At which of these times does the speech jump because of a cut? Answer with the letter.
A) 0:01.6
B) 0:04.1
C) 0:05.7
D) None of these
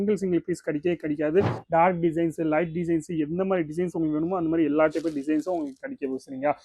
A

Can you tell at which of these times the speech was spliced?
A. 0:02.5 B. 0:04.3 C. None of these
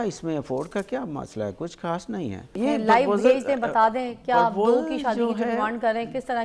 A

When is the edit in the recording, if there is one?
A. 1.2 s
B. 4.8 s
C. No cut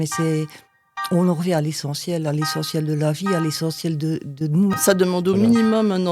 B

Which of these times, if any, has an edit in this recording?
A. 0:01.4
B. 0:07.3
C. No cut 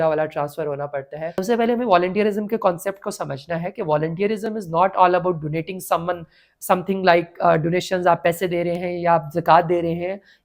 A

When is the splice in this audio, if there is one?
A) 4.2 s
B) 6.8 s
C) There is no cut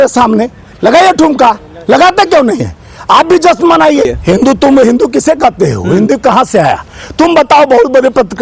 A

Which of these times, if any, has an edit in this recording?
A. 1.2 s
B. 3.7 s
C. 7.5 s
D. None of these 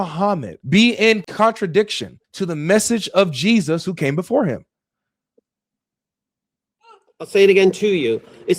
A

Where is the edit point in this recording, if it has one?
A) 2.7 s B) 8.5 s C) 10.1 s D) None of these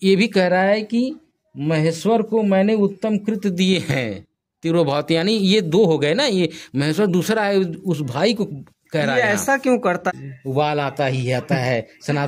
C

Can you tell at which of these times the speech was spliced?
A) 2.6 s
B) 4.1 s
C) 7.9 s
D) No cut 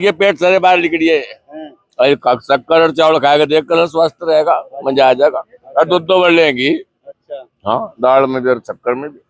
D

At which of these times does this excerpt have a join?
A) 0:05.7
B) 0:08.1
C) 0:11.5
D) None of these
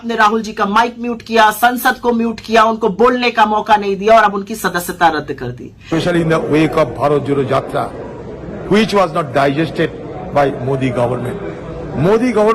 A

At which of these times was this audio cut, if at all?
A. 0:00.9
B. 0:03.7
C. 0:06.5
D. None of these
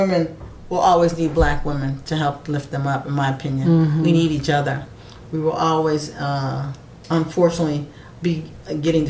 D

